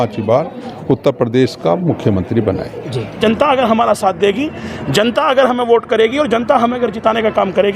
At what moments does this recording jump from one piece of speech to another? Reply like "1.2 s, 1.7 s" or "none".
3.1 s